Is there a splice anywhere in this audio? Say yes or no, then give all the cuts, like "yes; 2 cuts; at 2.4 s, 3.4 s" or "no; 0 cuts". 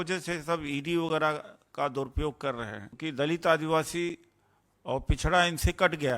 yes; 1 cut; at 2.9 s